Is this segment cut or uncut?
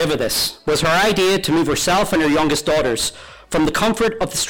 uncut